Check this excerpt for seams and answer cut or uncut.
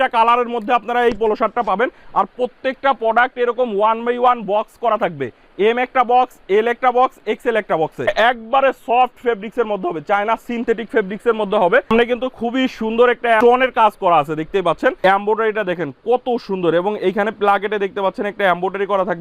cut